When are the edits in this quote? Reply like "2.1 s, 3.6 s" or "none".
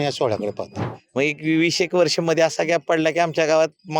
0.9 s